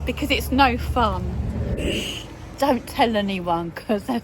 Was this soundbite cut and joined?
yes; 1 cut; at 1.7 s

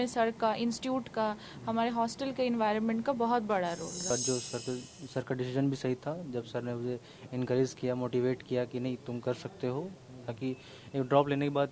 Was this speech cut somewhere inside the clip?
yes; 1 cut; at 4.1 s

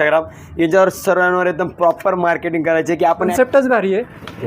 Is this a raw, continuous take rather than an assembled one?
no; 1 cut; at 3.3 s

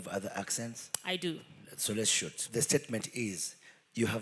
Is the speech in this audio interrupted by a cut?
yes; 2 cuts; at 1.6 s, 2.5 s

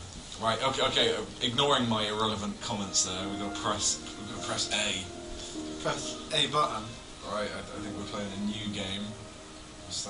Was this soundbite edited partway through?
yes; 1 cut; at 1.4 s

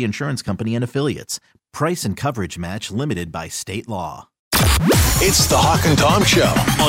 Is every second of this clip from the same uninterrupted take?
no; 1 cut; at 4.5 s

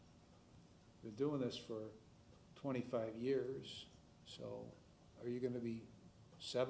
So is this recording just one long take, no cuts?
yes; 0 cuts

